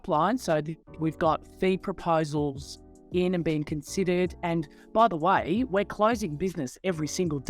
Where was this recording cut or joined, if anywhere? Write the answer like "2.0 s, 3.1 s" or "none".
0.9 s

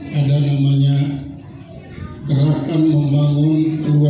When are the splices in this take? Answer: none

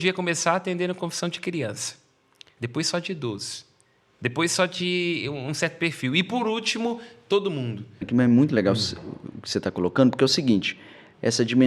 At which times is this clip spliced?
8.1 s

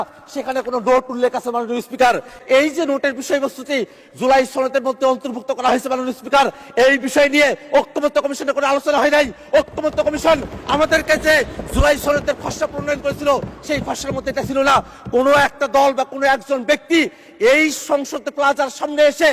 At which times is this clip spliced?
2.3 s

